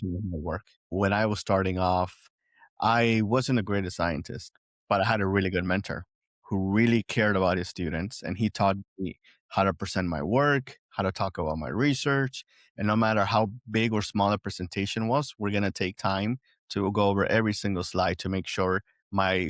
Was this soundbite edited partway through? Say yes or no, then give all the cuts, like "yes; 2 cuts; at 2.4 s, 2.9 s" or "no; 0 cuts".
yes; 1 cut; at 0.9 s